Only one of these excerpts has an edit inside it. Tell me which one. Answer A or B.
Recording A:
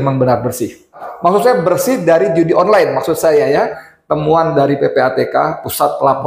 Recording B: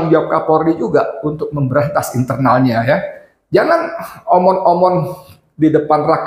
A